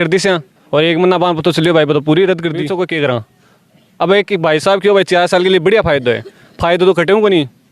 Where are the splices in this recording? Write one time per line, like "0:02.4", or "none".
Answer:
0:02.7